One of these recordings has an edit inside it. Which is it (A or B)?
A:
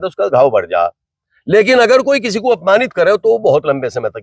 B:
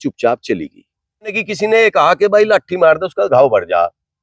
B